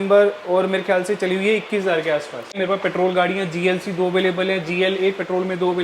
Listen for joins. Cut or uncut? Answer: cut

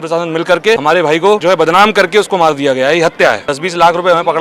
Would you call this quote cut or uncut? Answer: cut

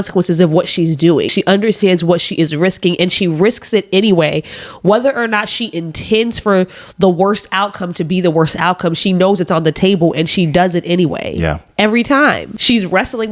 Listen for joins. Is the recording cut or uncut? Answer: cut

